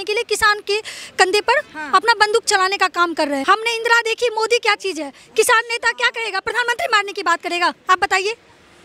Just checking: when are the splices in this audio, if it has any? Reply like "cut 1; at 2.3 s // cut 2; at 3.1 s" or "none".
cut 1; at 3.4 s